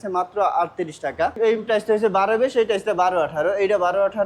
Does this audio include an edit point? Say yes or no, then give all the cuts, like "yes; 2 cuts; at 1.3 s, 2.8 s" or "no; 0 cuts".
yes; 1 cut; at 1.3 s